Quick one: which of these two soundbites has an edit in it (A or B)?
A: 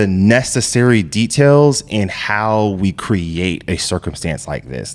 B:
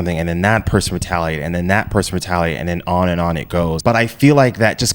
B